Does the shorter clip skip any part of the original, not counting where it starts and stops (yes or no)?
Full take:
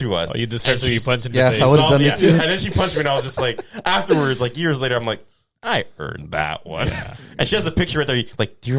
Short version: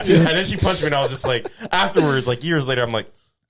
no